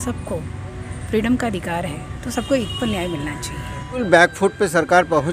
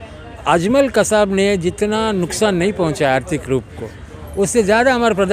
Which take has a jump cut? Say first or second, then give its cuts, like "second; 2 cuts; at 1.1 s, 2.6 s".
first; 1 cut; at 4.0 s